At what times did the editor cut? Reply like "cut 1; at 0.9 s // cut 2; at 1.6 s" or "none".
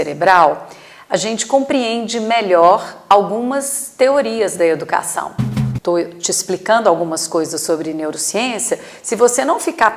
cut 1; at 5.5 s